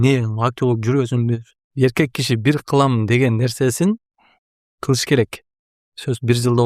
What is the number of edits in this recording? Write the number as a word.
one